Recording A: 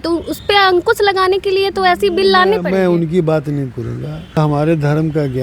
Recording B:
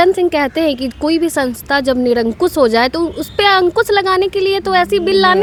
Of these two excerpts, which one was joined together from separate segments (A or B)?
A